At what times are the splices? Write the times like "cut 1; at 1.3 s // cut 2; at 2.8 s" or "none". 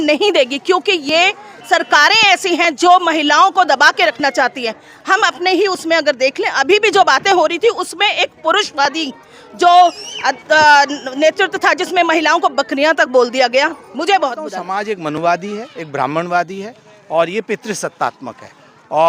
cut 1; at 14.6 s

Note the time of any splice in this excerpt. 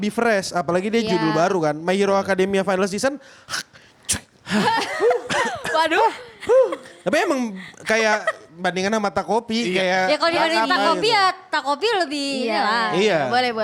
none

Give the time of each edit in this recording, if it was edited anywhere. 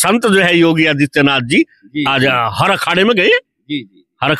none

